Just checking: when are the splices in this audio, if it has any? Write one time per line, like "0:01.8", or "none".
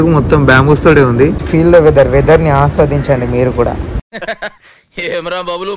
0:01.4